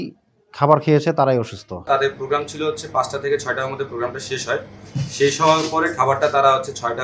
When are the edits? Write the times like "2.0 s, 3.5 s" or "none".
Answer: 1.9 s